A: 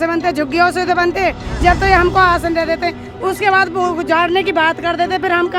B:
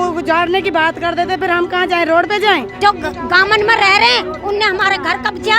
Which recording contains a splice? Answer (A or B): B